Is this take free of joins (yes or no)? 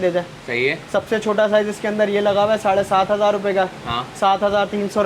yes